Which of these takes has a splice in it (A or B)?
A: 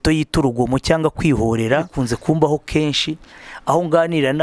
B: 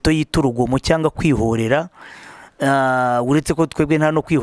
A